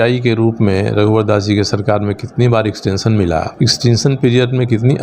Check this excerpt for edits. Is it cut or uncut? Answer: cut